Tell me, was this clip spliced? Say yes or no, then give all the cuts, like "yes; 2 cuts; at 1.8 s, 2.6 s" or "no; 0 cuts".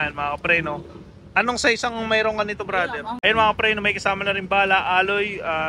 yes; 1 cut; at 3.1 s